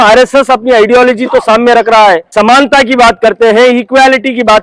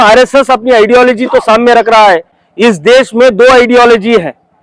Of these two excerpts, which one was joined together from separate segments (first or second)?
first